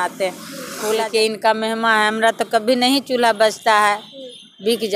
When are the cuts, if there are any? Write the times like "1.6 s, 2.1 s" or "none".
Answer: 1.0 s

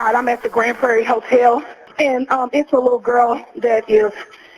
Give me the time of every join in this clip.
1.8 s

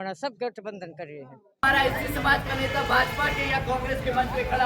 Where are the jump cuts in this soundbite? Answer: 1.6 s

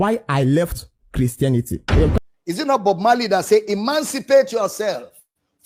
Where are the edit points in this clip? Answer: none

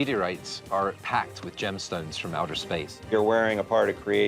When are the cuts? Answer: 1.0 s, 3.1 s

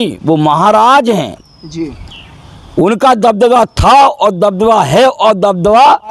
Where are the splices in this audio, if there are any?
none

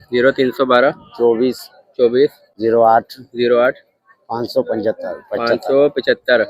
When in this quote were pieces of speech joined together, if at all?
none

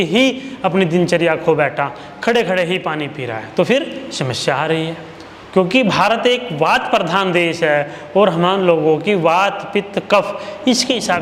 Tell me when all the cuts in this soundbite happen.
none

